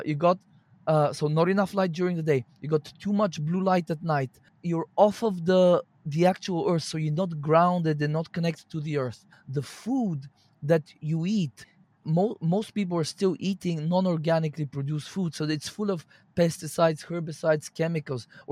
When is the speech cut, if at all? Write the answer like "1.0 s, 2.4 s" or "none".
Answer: 4.5 s, 9.4 s, 12.1 s